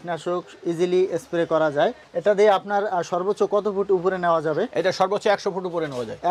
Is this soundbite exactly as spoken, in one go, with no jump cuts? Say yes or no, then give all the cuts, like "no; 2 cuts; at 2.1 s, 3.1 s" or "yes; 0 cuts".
no; 1 cut; at 2.1 s